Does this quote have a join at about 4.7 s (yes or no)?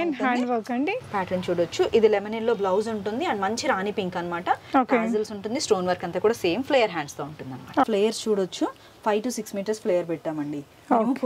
no